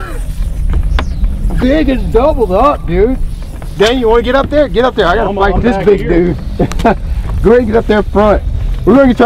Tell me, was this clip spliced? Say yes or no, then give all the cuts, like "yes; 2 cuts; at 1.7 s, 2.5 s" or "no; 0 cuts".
no; 0 cuts